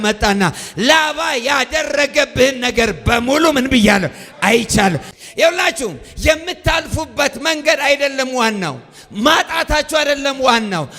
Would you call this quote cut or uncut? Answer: cut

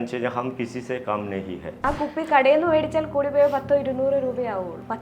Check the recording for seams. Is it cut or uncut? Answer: cut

